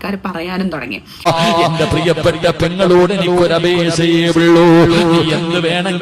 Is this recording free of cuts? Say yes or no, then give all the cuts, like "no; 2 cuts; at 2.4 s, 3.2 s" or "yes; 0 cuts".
no; 1 cut; at 1.3 s